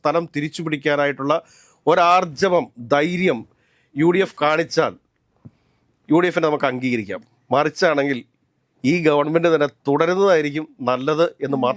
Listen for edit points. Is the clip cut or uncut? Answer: uncut